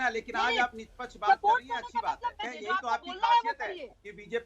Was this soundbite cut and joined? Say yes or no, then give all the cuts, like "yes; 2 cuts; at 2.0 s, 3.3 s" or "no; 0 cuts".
yes; 1 cut; at 2.4 s